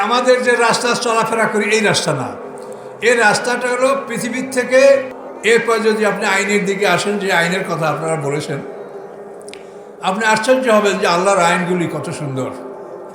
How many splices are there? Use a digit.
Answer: 1